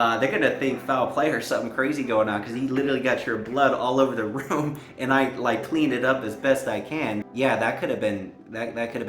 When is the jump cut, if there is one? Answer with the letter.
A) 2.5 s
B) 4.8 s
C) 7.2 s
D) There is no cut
C